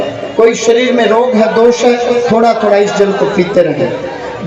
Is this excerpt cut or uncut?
uncut